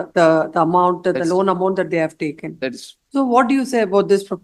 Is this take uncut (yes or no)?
yes